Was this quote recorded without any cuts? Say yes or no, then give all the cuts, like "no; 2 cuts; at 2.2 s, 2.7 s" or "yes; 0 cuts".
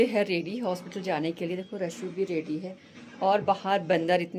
yes; 0 cuts